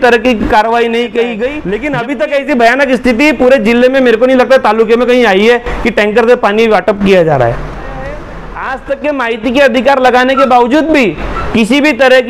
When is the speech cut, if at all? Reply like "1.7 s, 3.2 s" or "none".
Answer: 1.5 s, 8.4 s